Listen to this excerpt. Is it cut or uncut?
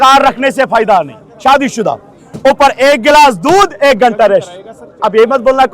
uncut